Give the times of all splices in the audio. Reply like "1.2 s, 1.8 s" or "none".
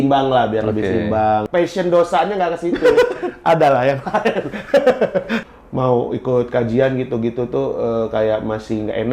1.5 s, 5.4 s